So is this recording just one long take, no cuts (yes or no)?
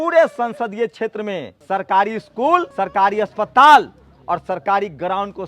no